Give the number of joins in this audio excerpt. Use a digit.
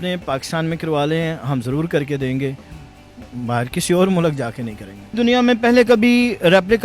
1